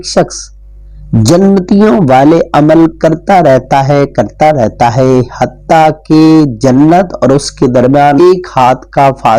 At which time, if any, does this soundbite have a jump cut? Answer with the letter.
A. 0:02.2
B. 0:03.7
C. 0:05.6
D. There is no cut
D